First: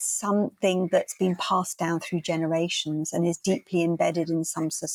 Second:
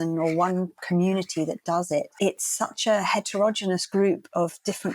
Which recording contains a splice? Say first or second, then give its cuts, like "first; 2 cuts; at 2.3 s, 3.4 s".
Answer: second; 1 cut; at 2.1 s